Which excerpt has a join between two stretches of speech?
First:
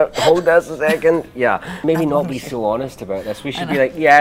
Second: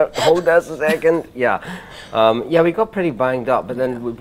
first; 1 cut; at 1.7 s

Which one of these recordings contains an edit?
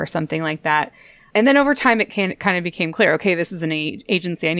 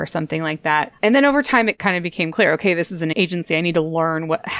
second; 3 cuts; at 0.9 s, 1.8 s, 3.1 s

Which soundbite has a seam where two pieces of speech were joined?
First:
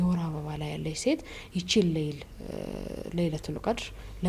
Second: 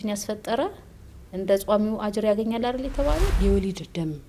second; 1 cut; at 3.3 s

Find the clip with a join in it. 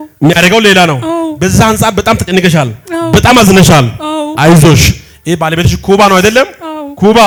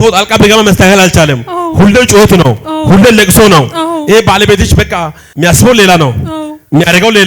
second; 1 cut; at 5.2 s

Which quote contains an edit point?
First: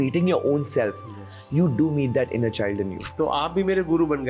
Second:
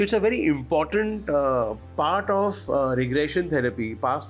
first; 1 cut; at 3.0 s

